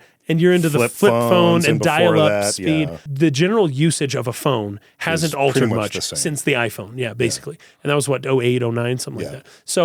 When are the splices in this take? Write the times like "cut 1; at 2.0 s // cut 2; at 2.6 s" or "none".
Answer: cut 1; at 3.0 s